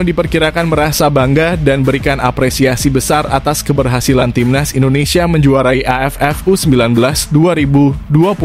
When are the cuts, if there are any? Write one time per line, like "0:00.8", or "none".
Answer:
none